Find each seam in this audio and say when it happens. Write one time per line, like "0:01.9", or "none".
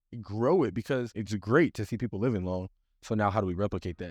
0:01.2